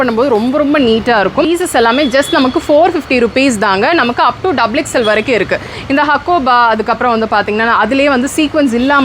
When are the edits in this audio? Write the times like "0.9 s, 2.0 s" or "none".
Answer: 1.5 s